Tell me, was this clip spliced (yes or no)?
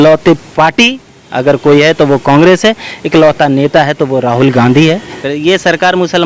yes